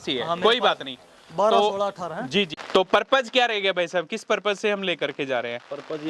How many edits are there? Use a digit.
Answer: 1